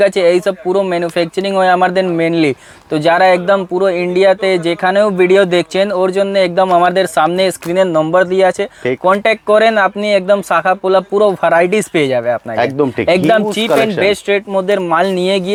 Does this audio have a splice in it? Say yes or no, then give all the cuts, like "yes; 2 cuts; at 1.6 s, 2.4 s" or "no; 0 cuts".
no; 0 cuts